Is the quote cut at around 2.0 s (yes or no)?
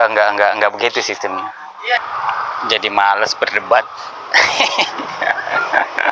yes